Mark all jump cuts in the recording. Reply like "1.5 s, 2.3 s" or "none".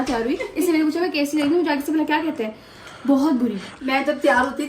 3.7 s